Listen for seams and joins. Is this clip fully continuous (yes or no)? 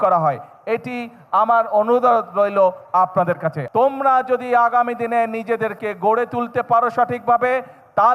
no